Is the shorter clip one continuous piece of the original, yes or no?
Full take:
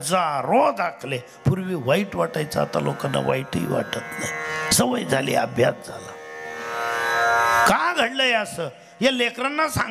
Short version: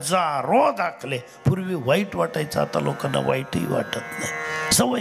yes